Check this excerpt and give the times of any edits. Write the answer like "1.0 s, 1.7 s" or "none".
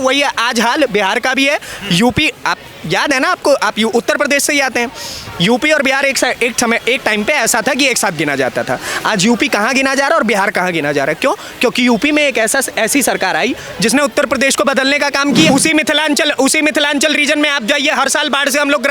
15.5 s